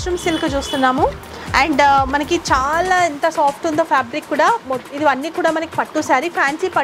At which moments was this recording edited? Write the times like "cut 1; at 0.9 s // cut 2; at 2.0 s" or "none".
none